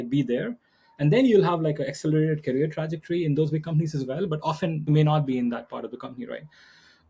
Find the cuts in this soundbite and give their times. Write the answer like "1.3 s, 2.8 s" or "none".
4.3 s